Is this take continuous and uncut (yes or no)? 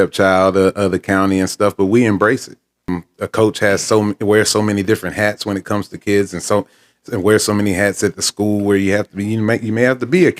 no